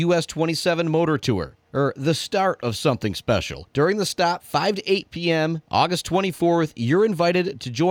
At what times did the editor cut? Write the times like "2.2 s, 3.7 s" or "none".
none